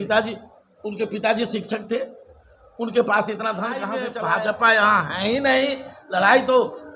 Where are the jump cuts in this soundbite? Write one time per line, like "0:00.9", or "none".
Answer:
0:04.0